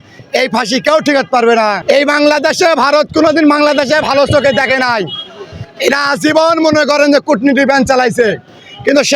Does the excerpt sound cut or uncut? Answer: cut